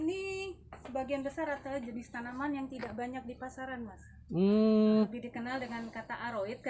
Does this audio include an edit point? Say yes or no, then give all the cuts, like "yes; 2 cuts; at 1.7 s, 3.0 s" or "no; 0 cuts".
yes; 1 cut; at 5.1 s